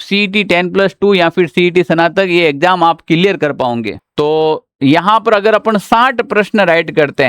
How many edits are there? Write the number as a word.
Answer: one